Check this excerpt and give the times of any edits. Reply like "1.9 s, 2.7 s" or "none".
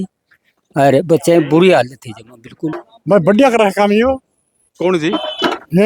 2.8 s